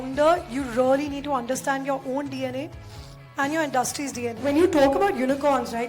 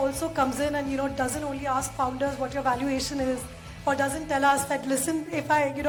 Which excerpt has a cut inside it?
first; 1 cut; at 4.4 s

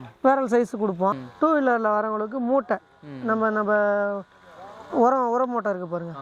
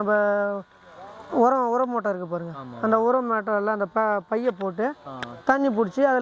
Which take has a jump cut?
first; 1 cut; at 1.3 s

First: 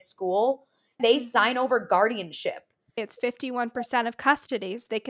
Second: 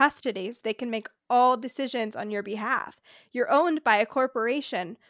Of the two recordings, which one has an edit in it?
first; 2 cuts; at 1.0 s, 3.0 s

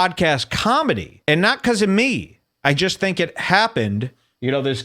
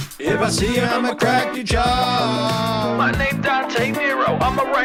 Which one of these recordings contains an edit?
first; 1 cut; at 1.1 s

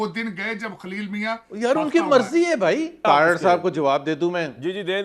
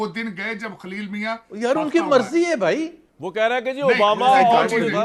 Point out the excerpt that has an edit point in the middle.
first; 1 cut; at 3.0 s

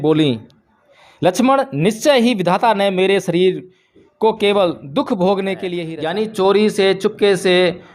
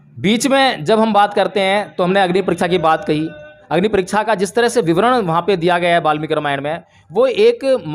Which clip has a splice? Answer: first; 1 cut; at 5.7 s

